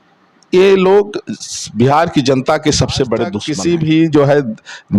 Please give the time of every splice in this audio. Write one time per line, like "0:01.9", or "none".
0:03.5

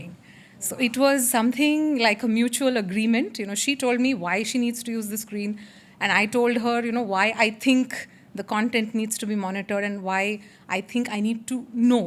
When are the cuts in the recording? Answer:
none

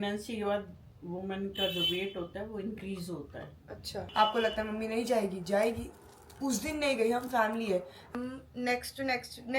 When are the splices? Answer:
0:04.0
0:08.1

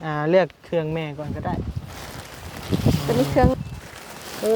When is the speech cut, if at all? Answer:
0:03.5

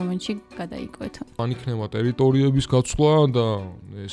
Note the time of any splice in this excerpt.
0:01.4

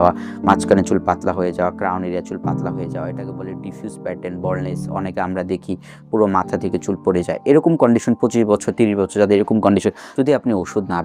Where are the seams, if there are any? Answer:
0:10.0

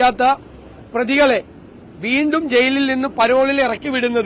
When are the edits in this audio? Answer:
none

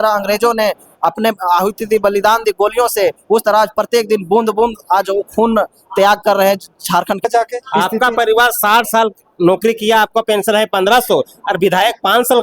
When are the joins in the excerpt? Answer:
0:07.2

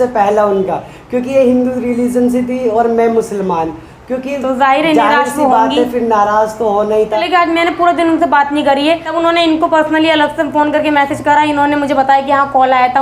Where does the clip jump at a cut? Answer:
0:07.2
0:09.1

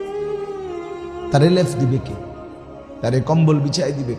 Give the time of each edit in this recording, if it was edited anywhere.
0:01.3

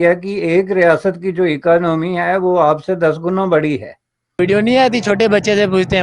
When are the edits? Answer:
0:04.3

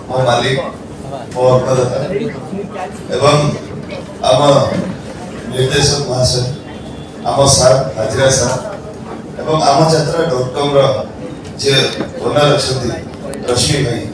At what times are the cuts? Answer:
none

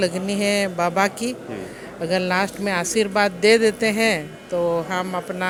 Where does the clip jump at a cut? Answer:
none

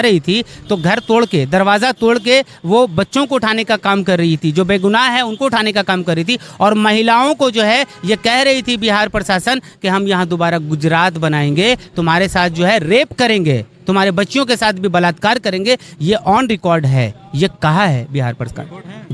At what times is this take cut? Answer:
none

